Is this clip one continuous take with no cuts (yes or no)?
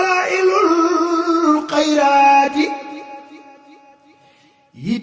yes